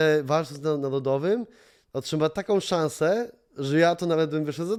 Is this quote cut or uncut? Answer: uncut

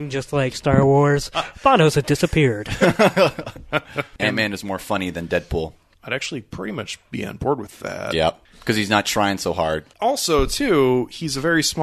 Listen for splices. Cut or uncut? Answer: cut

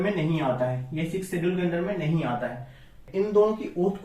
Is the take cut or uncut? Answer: cut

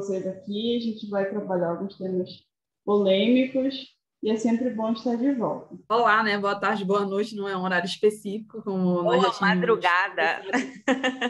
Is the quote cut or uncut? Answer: cut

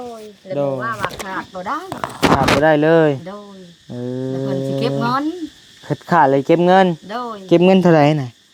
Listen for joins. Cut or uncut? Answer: uncut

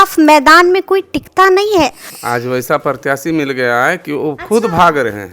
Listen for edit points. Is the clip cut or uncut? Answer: cut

